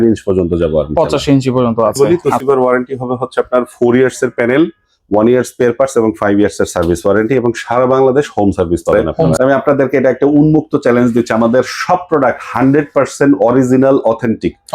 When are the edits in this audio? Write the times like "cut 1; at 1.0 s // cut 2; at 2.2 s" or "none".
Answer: cut 1; at 2.3 s // cut 2; at 9.3 s